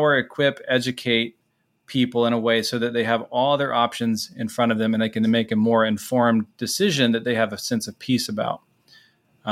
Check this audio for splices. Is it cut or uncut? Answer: uncut